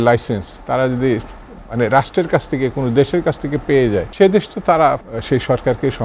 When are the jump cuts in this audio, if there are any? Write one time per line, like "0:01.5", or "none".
0:04.1
0:05.1